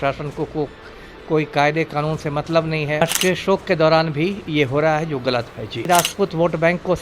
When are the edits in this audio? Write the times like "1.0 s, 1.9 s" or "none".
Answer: 3.0 s, 5.9 s